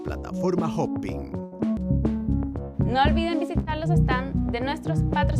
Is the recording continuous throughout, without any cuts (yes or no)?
no